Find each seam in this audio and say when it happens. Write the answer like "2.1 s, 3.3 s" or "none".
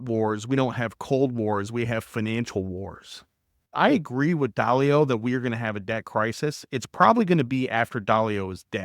3.7 s